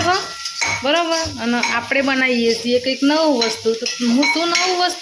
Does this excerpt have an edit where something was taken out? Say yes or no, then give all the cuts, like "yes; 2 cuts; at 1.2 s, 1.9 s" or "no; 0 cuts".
no; 0 cuts